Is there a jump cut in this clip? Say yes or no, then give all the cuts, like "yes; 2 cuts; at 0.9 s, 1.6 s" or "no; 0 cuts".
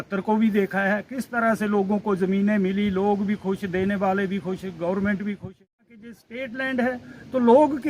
yes; 1 cut; at 6.0 s